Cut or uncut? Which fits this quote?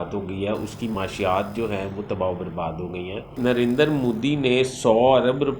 cut